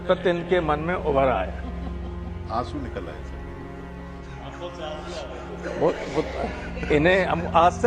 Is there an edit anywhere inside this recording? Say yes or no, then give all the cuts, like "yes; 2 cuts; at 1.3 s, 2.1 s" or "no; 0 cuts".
no; 0 cuts